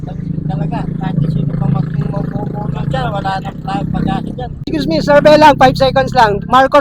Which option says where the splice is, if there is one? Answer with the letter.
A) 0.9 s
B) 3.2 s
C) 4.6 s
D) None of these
C